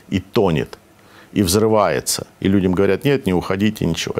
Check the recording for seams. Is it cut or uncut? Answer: uncut